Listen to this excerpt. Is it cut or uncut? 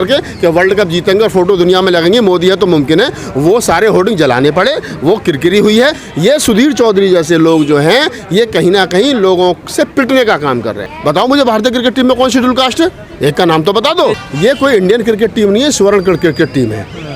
cut